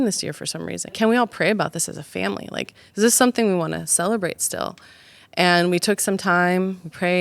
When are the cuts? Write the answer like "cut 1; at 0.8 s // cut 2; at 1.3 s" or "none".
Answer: cut 1; at 0.9 s